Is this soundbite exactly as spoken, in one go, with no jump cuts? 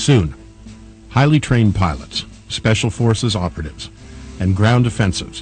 yes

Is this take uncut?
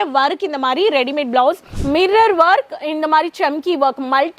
no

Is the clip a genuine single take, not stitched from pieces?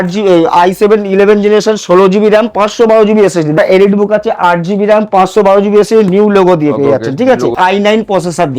no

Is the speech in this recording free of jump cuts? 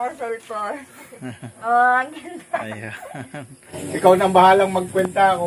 no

